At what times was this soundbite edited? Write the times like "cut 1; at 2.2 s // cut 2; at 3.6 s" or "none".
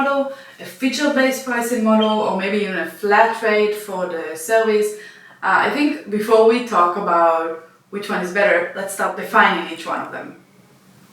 cut 1; at 9.2 s